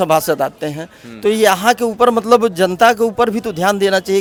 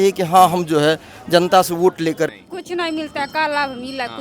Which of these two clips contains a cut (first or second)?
second